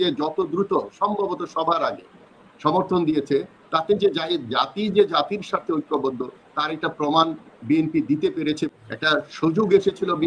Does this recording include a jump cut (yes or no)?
yes